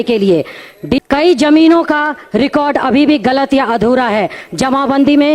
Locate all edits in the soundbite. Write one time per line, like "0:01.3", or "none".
0:01.0